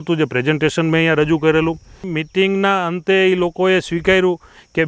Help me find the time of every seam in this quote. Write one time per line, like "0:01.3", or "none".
0:02.2